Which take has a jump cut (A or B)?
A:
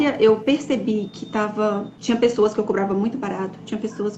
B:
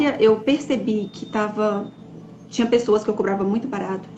A